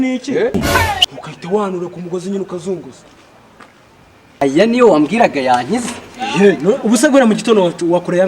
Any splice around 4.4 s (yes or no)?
yes